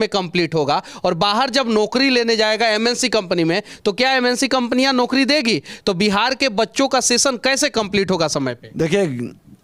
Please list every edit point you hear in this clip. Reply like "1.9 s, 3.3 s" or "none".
none